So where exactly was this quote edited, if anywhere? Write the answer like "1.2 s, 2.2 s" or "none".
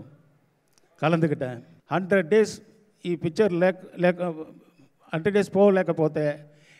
1.7 s

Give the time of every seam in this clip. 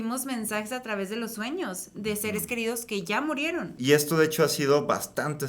3.8 s

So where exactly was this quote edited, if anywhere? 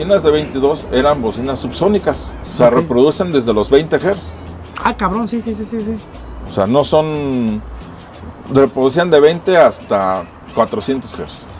none

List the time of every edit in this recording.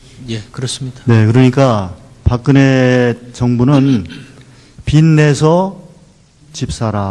3.7 s

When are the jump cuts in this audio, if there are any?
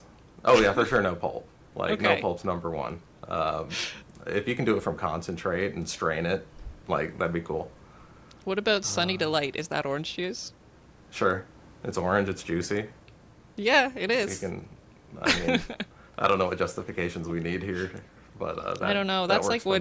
none

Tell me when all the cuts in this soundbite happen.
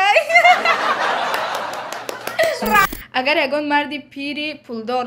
2.8 s

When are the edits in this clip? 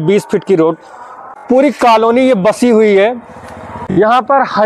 1.1 s, 3.8 s

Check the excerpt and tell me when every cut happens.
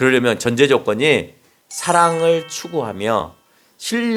none

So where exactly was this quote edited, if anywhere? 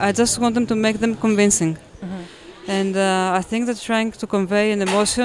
1.9 s

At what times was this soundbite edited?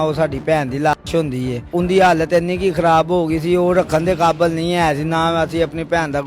1.6 s

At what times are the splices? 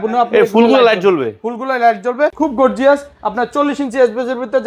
2.3 s

